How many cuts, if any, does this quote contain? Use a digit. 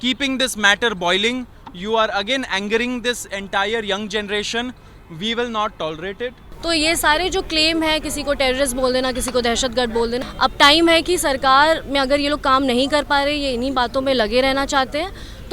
2